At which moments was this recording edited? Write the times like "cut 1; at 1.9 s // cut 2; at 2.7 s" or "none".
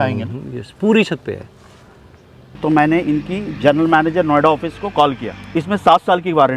cut 1; at 2.6 s // cut 2; at 5.5 s